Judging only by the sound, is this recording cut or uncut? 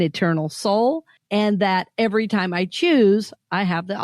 cut